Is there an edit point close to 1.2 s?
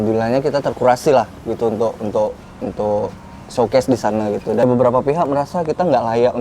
no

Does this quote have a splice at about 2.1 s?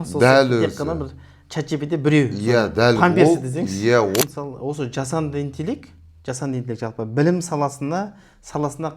no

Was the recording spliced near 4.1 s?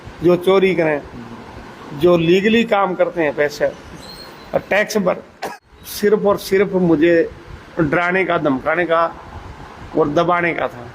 no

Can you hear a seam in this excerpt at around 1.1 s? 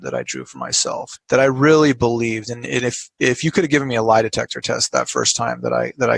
yes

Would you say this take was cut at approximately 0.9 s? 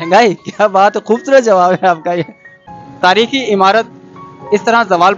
no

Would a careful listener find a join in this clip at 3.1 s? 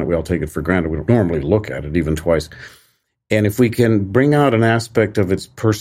no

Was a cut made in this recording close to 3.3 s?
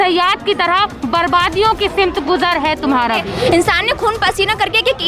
yes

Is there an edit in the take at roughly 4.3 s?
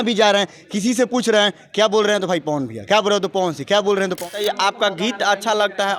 yes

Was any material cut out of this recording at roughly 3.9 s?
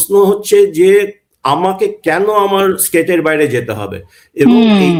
no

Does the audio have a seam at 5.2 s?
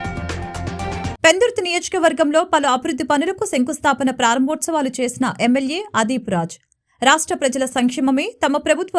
no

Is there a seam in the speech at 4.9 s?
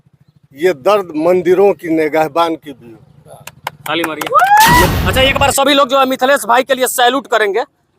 yes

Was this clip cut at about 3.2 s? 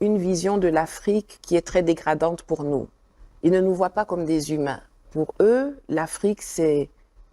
no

